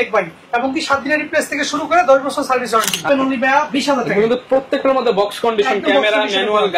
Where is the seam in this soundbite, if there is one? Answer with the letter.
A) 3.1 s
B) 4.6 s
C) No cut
A